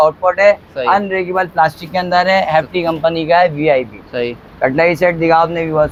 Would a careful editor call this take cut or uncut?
uncut